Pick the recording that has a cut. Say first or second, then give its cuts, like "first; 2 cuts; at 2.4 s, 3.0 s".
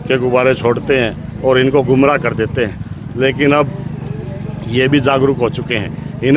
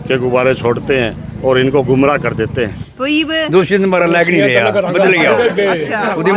second; 1 cut; at 2.9 s